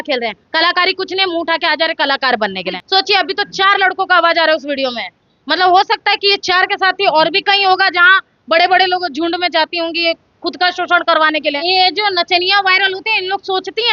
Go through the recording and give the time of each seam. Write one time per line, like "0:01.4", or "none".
0:02.8
0:11.6